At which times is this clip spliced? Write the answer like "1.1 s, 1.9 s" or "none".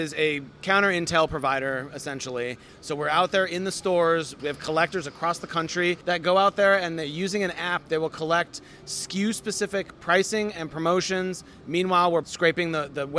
2.7 s, 4.3 s, 6.0 s, 12.2 s